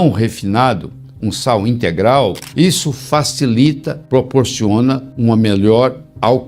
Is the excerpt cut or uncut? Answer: uncut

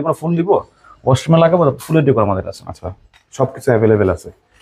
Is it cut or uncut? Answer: uncut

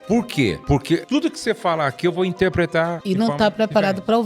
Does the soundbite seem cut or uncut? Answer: cut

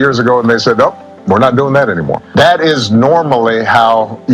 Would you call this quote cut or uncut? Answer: cut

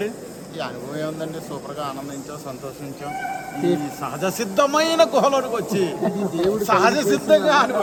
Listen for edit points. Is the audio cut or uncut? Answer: uncut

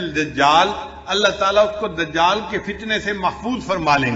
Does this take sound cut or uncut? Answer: uncut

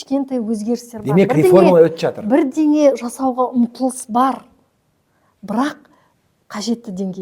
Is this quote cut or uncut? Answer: uncut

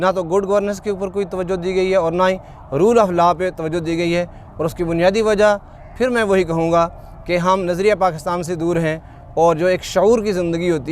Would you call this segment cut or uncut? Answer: uncut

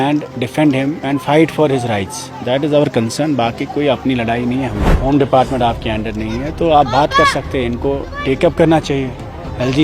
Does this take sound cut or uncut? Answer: cut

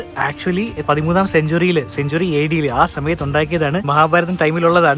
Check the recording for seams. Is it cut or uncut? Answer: cut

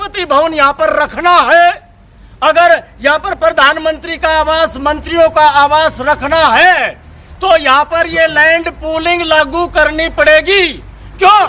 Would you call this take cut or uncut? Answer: uncut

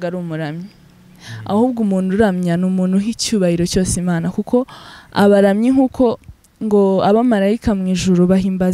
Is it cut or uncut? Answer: uncut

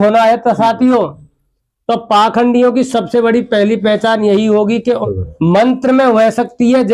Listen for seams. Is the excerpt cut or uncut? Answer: cut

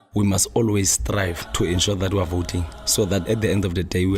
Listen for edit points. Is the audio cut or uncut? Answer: cut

